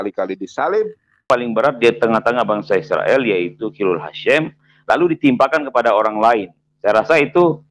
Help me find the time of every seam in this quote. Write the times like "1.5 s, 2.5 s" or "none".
1.2 s